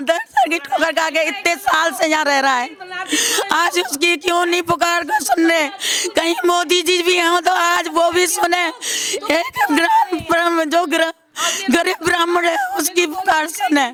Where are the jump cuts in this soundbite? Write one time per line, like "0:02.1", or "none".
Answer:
none